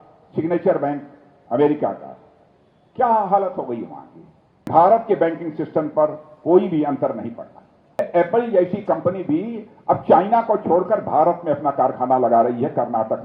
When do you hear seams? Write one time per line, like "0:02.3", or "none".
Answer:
0:04.7
0:08.0